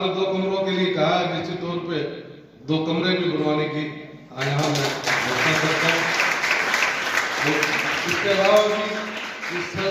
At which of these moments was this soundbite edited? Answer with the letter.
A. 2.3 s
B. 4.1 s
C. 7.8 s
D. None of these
D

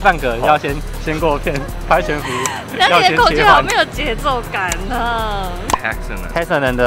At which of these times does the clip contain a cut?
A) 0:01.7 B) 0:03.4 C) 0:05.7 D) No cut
C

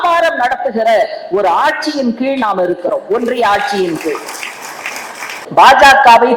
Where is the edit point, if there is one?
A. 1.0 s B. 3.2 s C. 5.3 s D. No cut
C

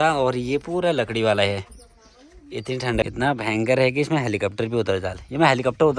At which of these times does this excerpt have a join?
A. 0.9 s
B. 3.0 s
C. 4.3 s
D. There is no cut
B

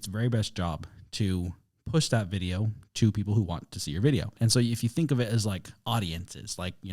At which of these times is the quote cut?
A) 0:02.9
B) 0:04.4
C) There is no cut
B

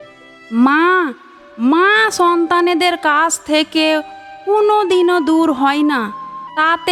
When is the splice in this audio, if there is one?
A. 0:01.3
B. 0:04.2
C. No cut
C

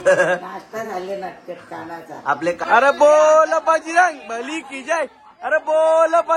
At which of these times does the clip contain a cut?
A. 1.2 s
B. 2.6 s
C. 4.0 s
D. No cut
B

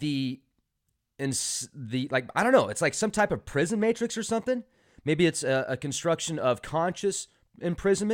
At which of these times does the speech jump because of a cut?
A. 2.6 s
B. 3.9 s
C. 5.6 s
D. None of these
D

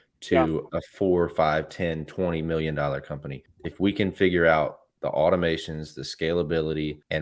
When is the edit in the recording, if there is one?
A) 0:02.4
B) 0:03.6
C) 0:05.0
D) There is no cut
D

